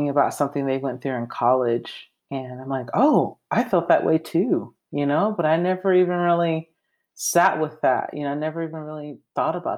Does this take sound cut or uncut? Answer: uncut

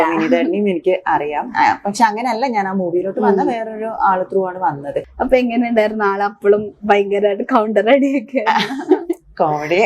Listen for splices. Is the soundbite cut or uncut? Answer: cut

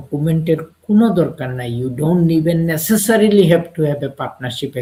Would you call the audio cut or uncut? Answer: uncut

